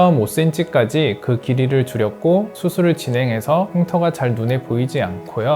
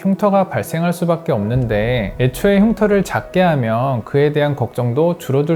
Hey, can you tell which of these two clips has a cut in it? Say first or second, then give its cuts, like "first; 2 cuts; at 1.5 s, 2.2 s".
first; 1 cut; at 2.5 s